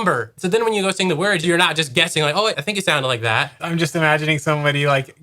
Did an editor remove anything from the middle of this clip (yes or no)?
yes